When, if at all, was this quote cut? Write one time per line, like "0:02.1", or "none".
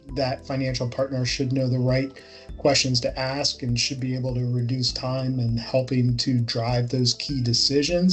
none